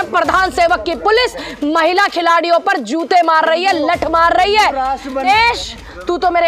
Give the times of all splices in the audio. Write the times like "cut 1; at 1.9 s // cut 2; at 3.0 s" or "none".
cut 1; at 5.3 s